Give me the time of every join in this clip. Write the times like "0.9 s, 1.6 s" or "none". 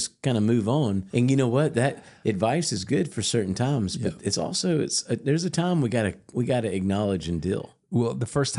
1.0 s